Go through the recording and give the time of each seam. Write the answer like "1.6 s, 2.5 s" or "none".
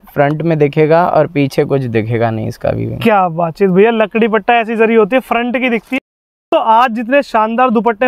5.9 s